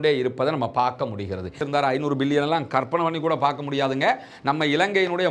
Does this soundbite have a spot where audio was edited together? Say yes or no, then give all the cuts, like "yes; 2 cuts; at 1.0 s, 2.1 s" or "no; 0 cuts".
yes; 1 cut; at 1.6 s